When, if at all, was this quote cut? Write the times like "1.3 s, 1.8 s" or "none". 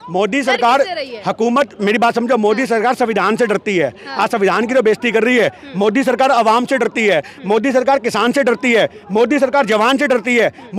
none